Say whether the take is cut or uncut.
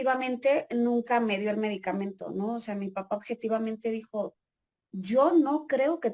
uncut